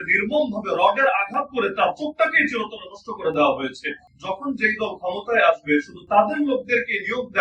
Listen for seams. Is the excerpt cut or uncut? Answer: cut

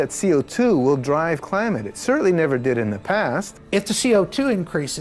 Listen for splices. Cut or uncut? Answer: cut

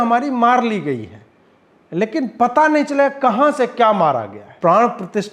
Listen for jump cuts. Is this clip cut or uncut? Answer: cut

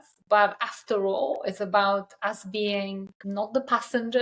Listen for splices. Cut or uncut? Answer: cut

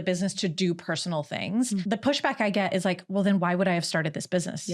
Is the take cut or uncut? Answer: cut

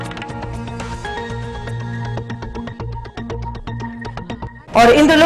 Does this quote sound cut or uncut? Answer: cut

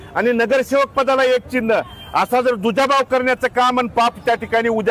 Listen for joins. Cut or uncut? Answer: uncut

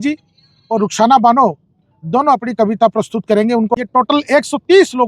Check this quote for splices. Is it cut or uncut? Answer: cut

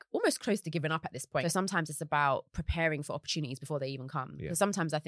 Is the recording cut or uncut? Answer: cut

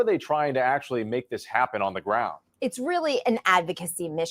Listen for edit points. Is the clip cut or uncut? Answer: cut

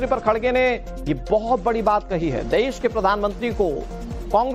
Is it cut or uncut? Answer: cut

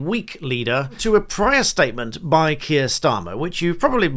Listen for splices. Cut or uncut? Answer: cut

